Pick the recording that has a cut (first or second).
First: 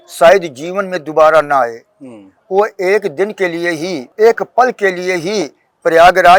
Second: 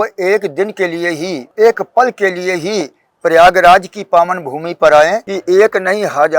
second